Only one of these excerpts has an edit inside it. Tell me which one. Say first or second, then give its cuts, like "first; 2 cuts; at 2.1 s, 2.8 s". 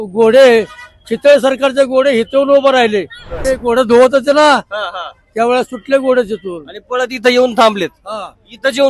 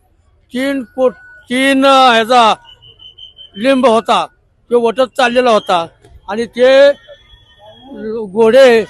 first; 1 cut; at 3.4 s